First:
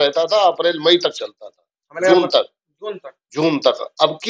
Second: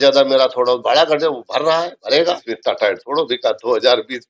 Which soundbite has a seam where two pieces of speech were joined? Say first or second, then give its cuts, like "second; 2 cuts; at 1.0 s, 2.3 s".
second; 1 cut; at 2.5 s